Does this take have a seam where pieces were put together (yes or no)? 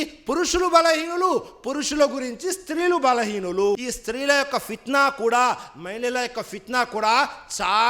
yes